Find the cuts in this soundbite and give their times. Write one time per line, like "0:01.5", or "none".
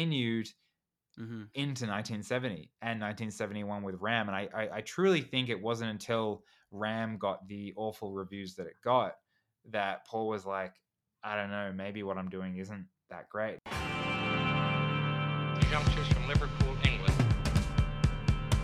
0:13.8

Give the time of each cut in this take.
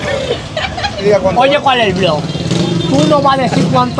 0:01.0

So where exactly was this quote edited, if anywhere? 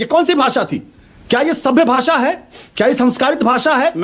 none

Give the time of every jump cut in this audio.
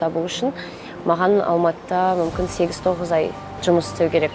0:03.5

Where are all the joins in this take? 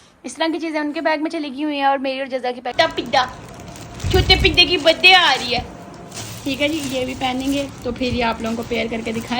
0:02.7

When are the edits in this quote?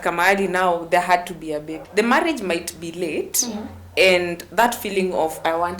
0:01.8

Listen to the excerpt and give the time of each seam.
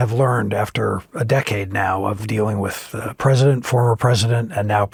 none

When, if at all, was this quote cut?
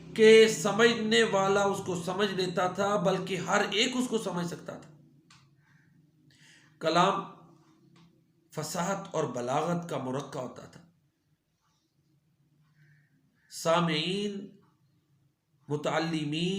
0:05.6

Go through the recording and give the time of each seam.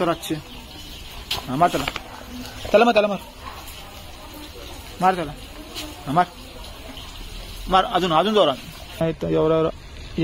0:01.2
0:09.0

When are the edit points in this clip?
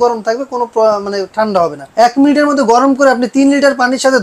0:01.8

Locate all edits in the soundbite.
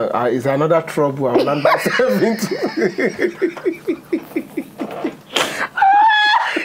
0:05.2

